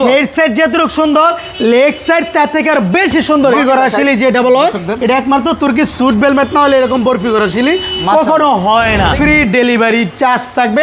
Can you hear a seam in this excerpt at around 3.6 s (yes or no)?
yes